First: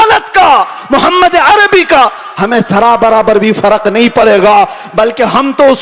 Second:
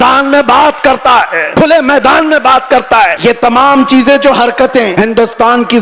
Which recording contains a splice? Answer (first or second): second